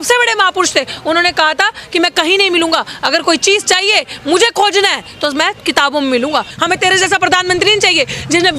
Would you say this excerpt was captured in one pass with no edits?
no; 1 cut; at 6.5 s

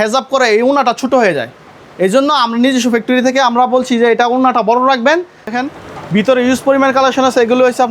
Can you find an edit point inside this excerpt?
yes; 1 cut; at 5.5 s

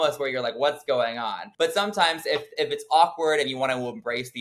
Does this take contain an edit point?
yes; 1 cut; at 1.4 s

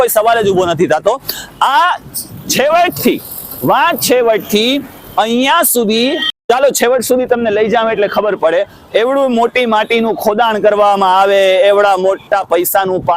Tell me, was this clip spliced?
no; 0 cuts

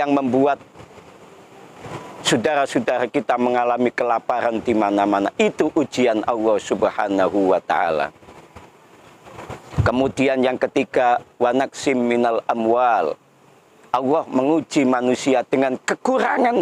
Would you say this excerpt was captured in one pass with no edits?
yes; 0 cuts

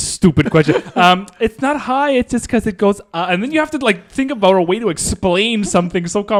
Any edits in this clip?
no; 0 cuts

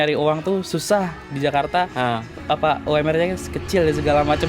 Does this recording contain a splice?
no; 0 cuts

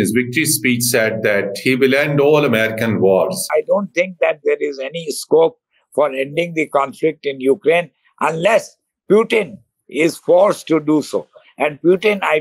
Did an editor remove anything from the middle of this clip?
yes; 1 cut; at 3.5 s

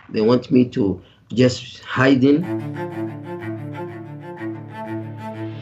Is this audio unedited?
no; 1 cut; at 2.6 s

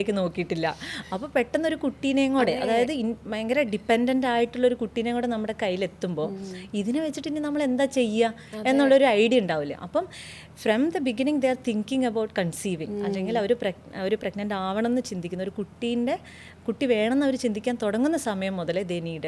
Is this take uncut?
yes; 0 cuts

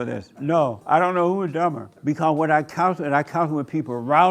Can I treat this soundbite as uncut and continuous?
no; 1 cut; at 1.9 s

